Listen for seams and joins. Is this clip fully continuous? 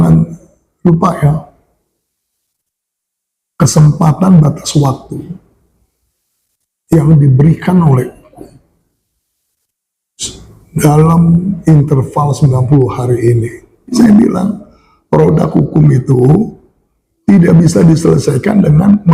no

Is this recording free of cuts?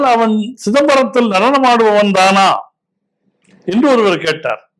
yes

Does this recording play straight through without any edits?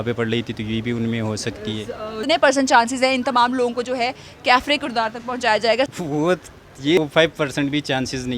no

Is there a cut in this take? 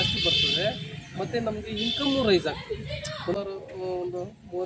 yes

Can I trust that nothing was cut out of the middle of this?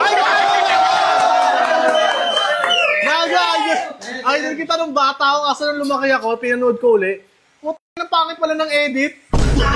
yes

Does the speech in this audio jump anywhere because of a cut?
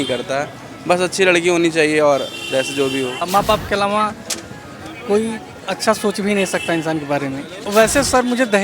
yes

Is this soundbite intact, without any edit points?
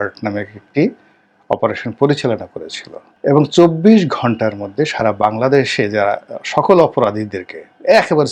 yes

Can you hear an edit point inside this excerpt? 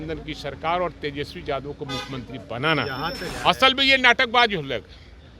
yes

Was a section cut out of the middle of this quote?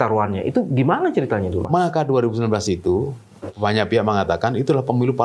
yes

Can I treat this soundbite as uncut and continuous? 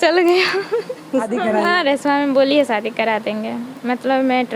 no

